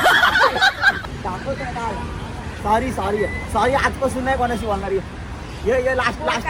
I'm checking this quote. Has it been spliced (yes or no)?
yes